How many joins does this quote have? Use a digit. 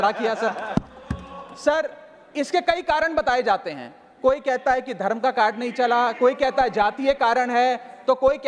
0